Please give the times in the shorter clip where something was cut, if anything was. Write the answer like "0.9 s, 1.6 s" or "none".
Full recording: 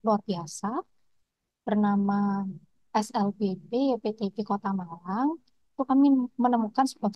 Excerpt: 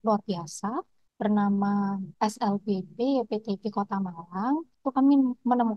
1.0 s, 2.1 s, 4.7 s